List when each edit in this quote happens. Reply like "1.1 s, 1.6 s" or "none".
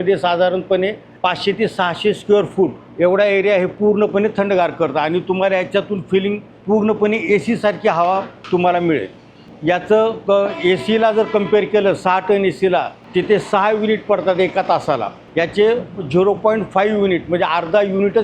1.0 s, 2.8 s, 6.5 s, 8.3 s, 9.4 s, 13.0 s, 15.2 s